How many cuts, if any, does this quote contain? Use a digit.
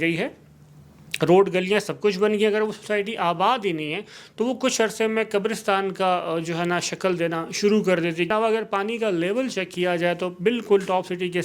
1